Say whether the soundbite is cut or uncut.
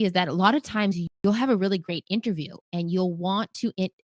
cut